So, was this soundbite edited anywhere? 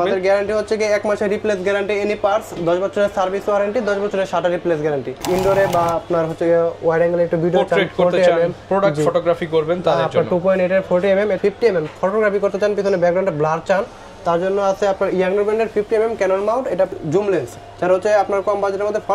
yes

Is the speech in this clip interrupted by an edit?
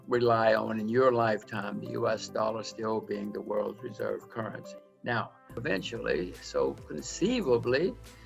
yes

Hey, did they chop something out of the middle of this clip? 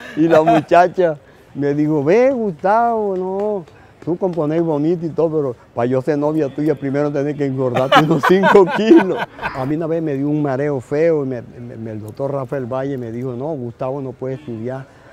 yes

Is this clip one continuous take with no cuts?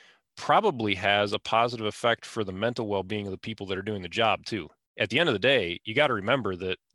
no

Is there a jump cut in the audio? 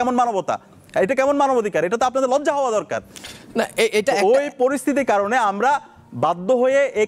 no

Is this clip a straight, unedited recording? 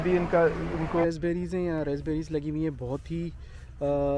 no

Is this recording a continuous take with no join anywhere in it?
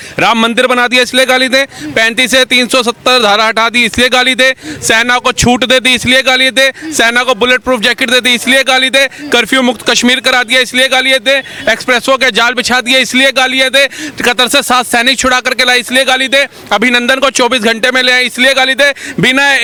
yes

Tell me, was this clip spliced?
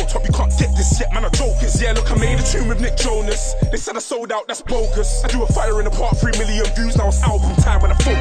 no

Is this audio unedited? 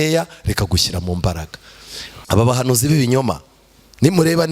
no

